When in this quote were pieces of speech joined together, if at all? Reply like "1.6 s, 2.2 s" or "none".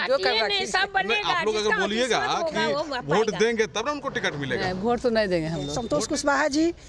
5.7 s